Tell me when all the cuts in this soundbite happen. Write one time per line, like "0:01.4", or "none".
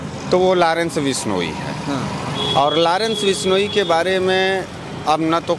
none